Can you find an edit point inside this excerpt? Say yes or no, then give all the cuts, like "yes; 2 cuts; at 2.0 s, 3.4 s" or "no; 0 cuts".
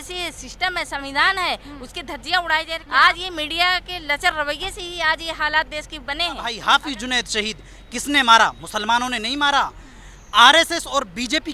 yes; 2 cuts; at 2.8 s, 6.5 s